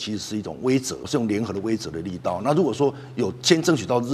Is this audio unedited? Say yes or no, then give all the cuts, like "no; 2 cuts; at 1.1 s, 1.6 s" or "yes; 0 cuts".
no; 1 cut; at 1.0 s